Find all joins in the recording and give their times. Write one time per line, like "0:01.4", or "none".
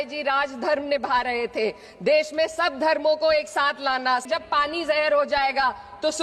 0:04.3